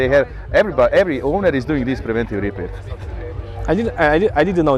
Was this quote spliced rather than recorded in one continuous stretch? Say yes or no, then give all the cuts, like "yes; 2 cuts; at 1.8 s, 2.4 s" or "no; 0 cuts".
no; 0 cuts